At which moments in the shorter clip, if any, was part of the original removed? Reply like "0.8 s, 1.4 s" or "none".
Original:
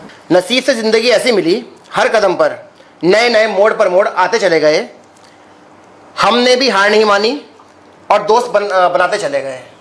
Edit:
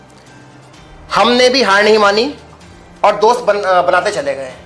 none